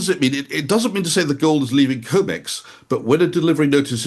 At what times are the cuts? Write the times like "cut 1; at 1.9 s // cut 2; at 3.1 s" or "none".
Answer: none